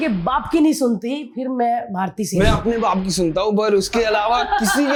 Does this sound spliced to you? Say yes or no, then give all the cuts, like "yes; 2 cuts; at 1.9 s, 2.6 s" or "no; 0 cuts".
no; 0 cuts